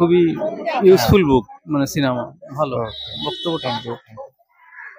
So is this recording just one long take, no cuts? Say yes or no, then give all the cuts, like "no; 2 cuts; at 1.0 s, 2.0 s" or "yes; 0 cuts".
yes; 0 cuts